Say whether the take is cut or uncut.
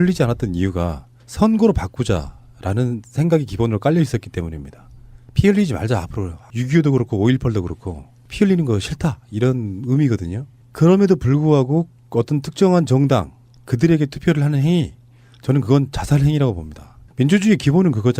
cut